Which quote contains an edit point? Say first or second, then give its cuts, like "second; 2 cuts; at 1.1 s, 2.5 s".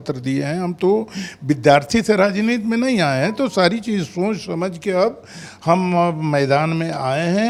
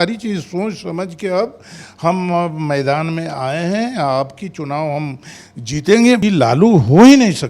second; 1 cut; at 6.2 s